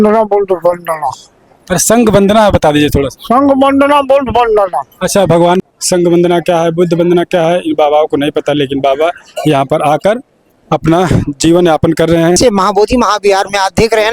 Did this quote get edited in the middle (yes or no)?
yes